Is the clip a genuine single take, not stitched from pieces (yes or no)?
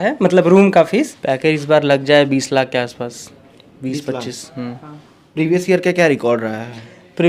no